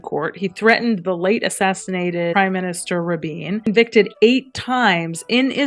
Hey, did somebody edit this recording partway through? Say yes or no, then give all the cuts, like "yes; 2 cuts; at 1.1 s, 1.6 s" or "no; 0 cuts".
yes; 2 cuts; at 2.3 s, 3.7 s